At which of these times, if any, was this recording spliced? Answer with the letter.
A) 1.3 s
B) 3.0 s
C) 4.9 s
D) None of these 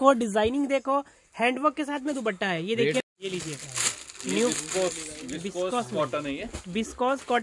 B